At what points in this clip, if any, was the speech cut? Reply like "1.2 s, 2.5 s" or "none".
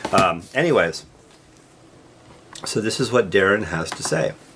3.3 s